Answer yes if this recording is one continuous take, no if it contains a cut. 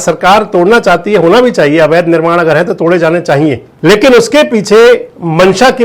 no